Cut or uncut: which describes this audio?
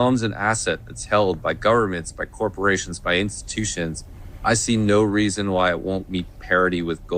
uncut